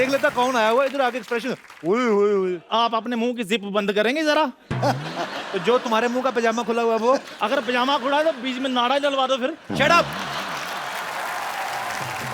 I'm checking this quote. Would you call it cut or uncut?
cut